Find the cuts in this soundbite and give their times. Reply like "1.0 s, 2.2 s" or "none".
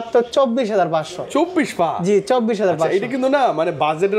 none